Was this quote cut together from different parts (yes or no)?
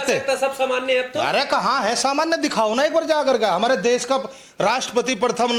no